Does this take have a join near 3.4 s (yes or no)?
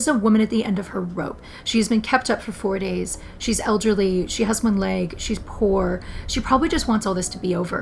no